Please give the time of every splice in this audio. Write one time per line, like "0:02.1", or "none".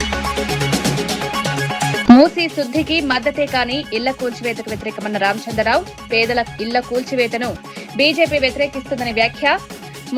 0:02.0